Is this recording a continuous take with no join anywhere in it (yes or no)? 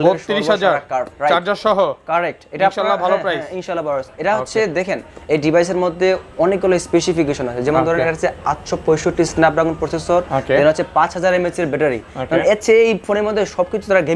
yes